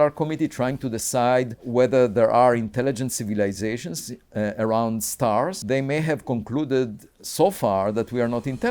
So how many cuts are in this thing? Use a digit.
2